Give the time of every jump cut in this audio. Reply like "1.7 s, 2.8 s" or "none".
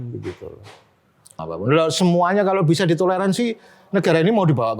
1.4 s